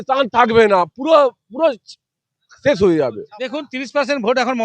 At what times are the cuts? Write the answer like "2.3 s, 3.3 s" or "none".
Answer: 3.5 s